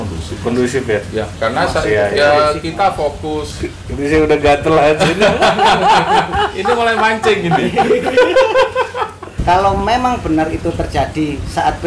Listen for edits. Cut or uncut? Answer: cut